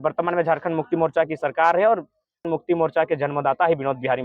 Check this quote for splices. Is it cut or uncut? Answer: cut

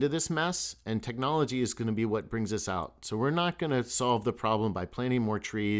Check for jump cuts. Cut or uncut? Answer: uncut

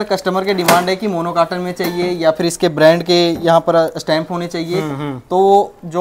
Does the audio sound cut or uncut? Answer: uncut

